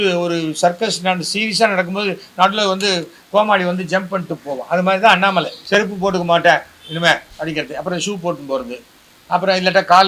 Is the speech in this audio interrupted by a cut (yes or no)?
yes